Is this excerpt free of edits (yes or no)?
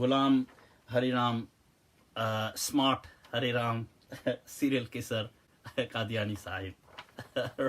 yes